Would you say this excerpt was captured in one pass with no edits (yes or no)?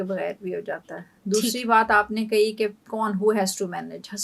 yes